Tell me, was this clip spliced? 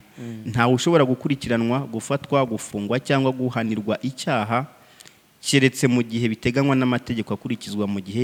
no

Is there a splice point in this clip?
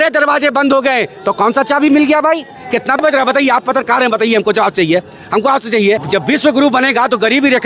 yes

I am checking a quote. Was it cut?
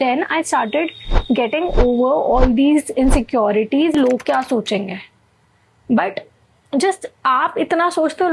yes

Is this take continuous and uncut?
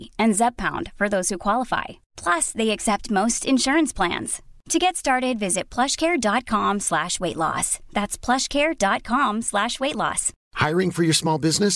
yes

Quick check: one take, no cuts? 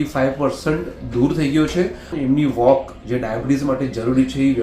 no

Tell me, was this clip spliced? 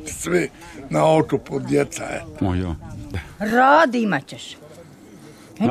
yes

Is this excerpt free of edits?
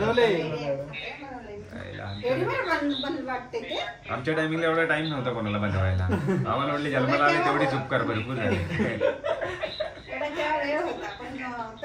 yes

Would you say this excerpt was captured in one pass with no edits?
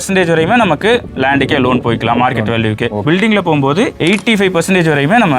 no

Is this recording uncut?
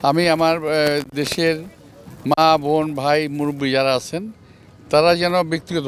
yes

